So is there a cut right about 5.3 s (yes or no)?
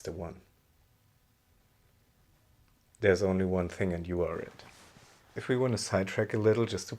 yes